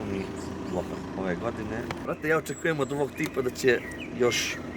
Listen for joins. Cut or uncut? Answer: cut